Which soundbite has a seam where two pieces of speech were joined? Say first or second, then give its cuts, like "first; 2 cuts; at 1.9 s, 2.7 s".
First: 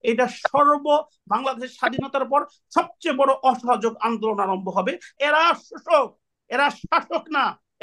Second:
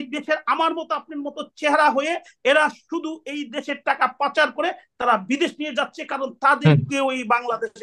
first; 1 cut; at 5.1 s